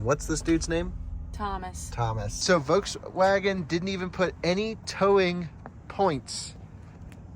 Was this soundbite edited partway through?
yes; 1 cut; at 2.3 s

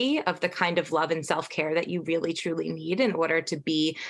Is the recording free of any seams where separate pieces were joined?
yes; 0 cuts

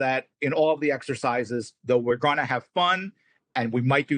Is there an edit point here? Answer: no; 0 cuts

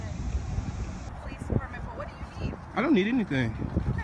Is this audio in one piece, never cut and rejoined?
no; 1 cut; at 1.1 s

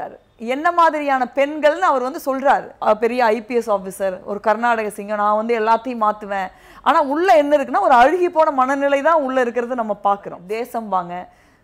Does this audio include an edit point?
yes; 2 cuts; at 2.7 s, 10.4 s

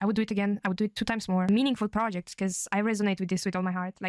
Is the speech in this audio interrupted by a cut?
yes; 1 cut; at 1.5 s

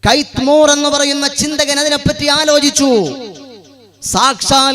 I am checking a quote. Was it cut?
no; 0 cuts

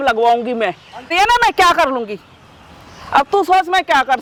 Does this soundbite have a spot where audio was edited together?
no; 0 cuts

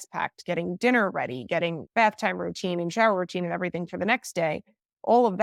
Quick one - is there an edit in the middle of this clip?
no; 0 cuts

